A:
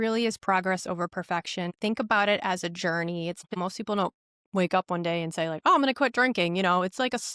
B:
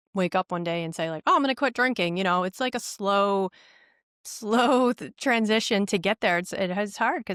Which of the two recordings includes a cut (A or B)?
A